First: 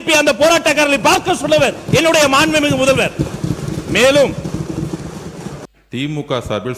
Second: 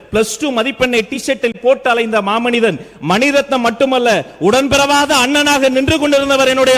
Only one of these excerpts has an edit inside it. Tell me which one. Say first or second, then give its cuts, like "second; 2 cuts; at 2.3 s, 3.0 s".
first; 1 cut; at 5.6 s